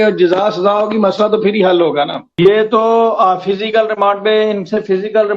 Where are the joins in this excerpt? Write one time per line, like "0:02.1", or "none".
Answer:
0:02.2